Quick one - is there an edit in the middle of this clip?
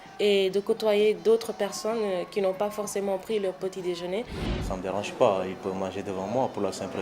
yes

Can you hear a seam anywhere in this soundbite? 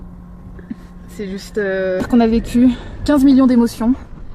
yes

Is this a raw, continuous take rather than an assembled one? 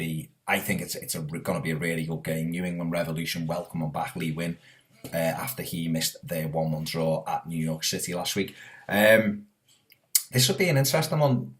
no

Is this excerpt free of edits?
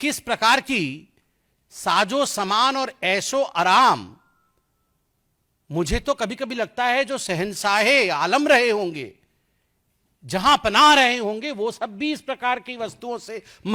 yes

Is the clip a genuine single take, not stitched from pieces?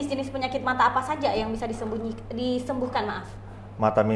yes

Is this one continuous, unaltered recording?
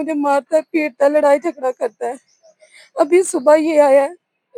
yes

